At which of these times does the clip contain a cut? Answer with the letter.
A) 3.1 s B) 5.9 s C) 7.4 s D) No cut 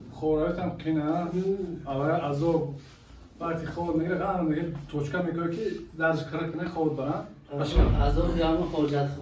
C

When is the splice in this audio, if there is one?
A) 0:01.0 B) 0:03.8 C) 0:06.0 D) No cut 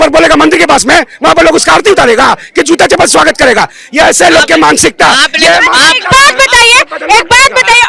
D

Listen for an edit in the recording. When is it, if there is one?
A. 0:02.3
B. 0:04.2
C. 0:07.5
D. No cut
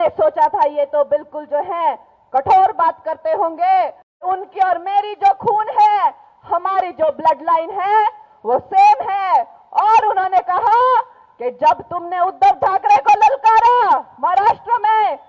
B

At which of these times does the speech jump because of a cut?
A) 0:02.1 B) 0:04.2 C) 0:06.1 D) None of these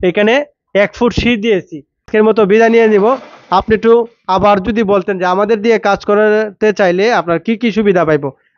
A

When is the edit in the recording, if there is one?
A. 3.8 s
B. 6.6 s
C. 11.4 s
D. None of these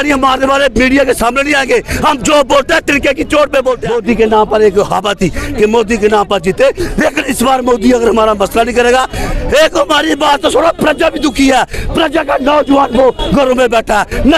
A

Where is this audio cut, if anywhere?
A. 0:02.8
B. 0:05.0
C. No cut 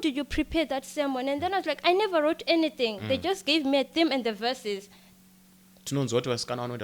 B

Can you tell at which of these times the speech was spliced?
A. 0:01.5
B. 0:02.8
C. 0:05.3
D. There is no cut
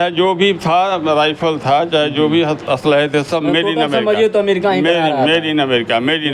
D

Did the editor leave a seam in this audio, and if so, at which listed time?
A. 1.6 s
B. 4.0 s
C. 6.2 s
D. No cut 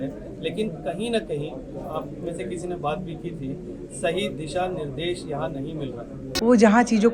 C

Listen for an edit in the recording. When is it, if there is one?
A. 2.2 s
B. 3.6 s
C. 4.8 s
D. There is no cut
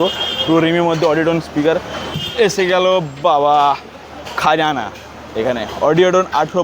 A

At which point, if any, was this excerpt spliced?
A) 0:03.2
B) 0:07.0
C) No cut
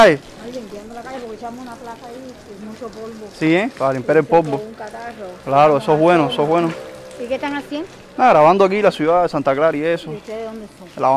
C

